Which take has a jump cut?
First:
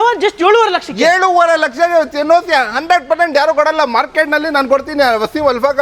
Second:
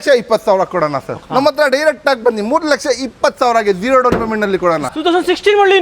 second; 2 cuts; at 1.2 s, 4.8 s

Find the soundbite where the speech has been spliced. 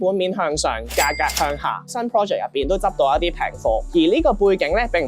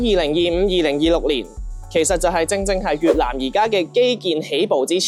first; 1 cut; at 1.9 s

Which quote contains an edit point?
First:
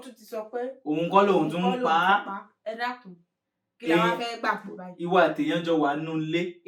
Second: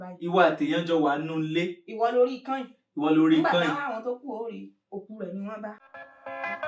second; 1 cut; at 5.8 s

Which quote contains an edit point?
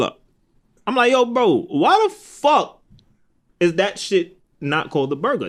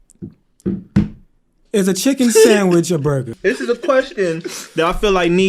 second; 1 cut; at 3.3 s

